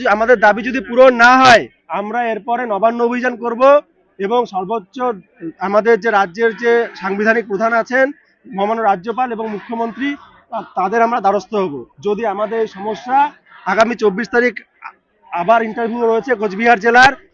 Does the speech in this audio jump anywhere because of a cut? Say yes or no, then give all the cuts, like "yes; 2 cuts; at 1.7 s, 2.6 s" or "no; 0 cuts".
no; 0 cuts